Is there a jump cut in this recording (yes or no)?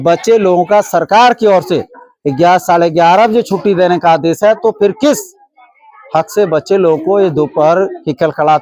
no